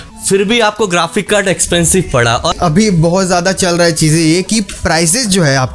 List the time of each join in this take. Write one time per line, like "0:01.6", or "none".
0:02.6

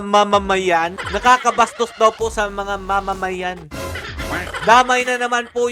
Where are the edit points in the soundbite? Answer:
0:01.0

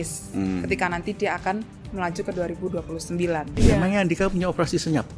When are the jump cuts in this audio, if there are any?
0:03.6

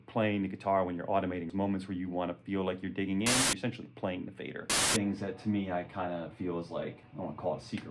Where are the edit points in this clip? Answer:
0:01.5
0:03.4
0:04.7
0:07.0

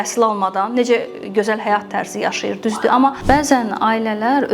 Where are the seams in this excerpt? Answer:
0:03.2

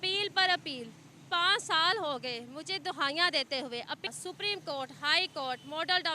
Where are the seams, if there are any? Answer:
0:04.1

